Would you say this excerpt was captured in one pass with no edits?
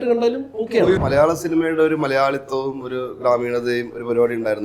no; 1 cut; at 1.0 s

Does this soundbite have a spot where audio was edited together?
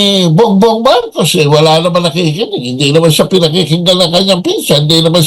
no; 0 cuts

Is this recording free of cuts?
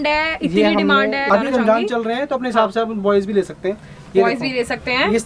no; 1 cut; at 1.2 s

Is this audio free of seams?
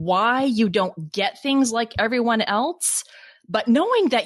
yes; 0 cuts

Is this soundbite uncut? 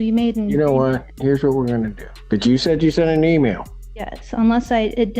no; 2 cuts; at 1.1 s, 2.1 s

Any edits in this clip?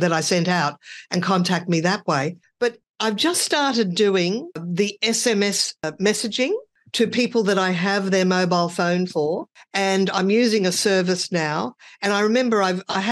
no; 0 cuts

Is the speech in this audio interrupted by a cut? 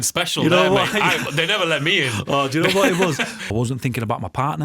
yes; 1 cut; at 3.3 s

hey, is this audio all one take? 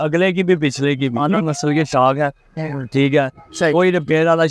no; 1 cut; at 1.4 s

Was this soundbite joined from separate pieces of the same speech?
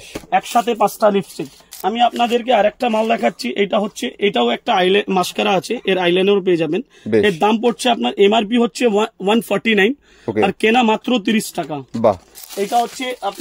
yes; 2 cuts; at 1.6 s, 12.3 s

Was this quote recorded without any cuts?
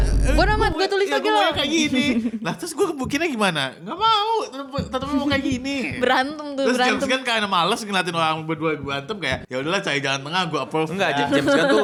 yes; 0 cuts

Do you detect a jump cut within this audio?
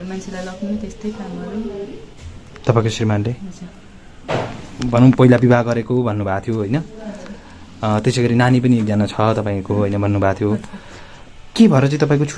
yes; 1 cut; at 4.2 s

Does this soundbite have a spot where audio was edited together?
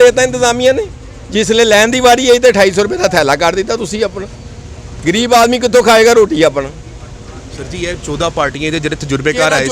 no; 0 cuts

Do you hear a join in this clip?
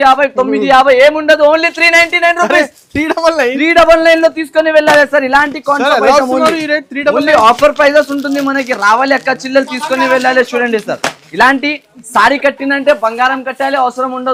no; 0 cuts

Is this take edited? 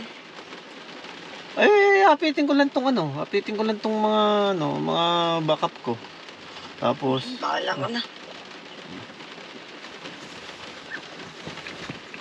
no; 0 cuts

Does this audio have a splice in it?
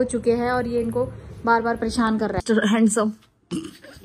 yes; 1 cut; at 2.4 s

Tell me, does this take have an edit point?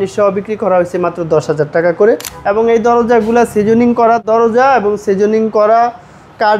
yes; 2 cuts; at 2.3 s, 4.2 s

